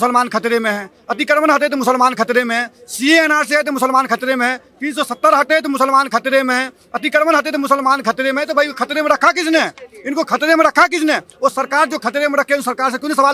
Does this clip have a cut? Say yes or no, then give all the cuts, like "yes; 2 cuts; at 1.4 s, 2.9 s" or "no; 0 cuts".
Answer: no; 0 cuts